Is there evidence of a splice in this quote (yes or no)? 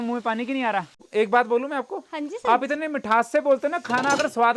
yes